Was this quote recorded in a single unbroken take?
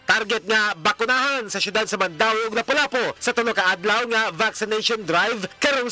yes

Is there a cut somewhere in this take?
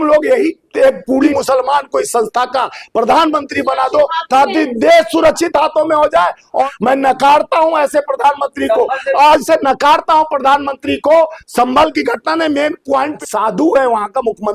yes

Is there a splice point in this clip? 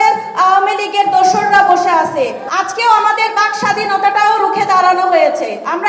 yes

